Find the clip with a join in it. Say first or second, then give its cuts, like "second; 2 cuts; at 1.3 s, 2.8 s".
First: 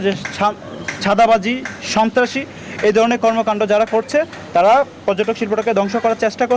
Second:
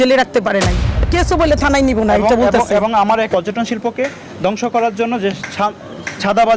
second; 2 cuts; at 1.1 s, 3.3 s